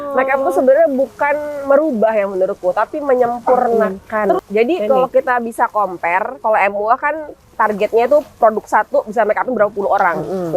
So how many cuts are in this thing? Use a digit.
1